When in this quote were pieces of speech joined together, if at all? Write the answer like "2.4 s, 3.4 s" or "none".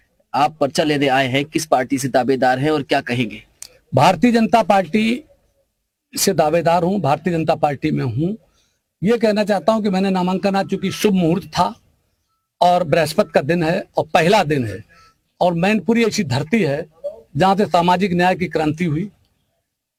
none